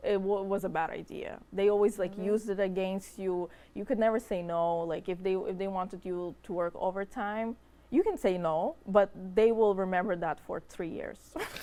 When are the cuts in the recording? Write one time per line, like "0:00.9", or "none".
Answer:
none